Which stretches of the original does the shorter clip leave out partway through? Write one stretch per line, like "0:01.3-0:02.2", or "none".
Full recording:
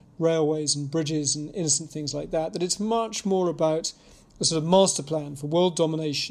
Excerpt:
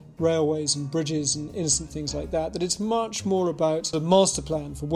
0:03.9-0:04.5